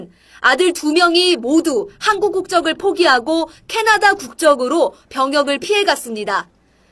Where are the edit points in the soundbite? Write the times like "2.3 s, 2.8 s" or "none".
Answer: 1.2 s